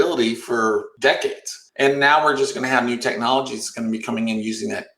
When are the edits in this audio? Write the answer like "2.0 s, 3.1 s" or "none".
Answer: 1.1 s